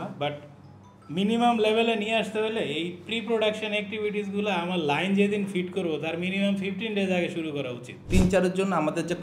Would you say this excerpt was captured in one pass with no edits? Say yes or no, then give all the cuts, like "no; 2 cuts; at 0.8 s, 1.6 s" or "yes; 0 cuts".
no; 1 cut; at 8.0 s